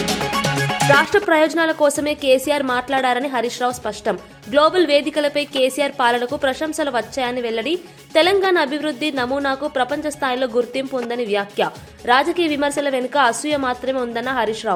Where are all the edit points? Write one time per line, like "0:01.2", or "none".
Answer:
none